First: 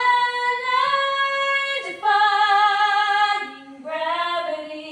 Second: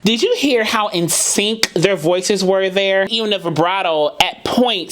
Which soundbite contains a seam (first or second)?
second